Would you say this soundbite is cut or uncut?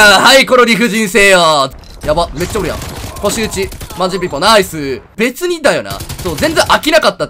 cut